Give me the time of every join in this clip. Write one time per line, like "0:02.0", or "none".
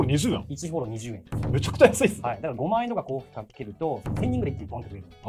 none